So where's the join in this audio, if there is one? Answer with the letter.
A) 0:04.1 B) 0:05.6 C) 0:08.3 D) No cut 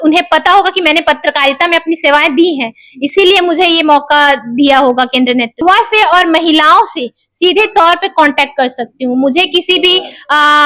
B